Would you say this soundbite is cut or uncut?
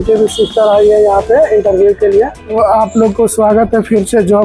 cut